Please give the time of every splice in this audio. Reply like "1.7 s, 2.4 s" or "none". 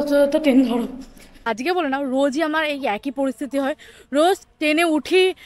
1.4 s